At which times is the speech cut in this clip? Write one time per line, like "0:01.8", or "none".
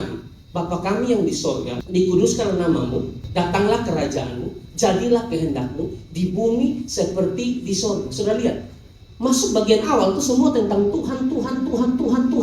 0:01.8
0:03.2